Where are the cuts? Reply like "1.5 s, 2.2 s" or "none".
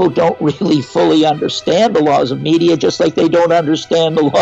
none